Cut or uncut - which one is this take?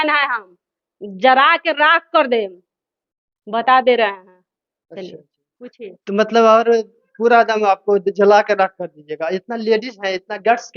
uncut